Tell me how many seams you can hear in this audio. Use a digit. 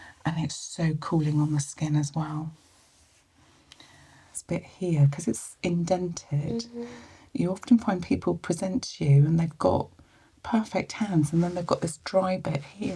1